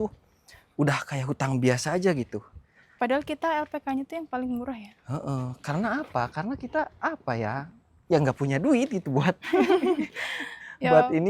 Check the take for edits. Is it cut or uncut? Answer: uncut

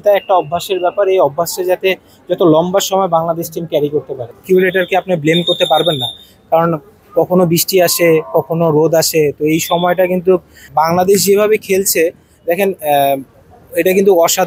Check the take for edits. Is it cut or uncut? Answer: cut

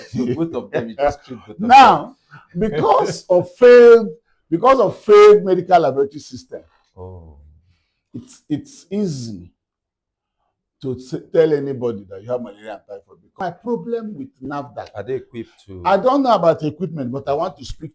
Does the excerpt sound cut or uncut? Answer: cut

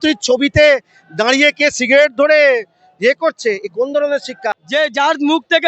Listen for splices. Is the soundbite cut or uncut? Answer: cut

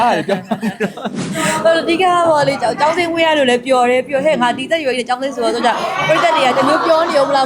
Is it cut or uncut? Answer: cut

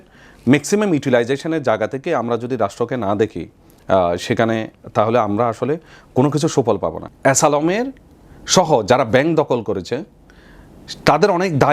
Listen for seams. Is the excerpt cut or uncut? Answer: cut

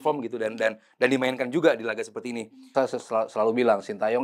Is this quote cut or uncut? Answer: cut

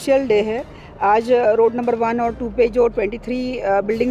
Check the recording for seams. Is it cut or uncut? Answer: uncut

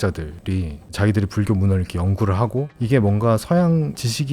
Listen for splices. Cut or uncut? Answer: cut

